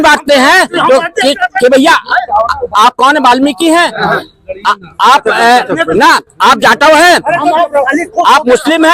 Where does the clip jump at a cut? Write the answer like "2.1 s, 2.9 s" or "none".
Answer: none